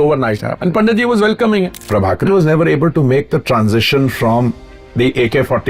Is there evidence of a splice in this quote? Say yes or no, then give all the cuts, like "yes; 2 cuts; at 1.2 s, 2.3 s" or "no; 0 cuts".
yes; 1 cut; at 2.3 s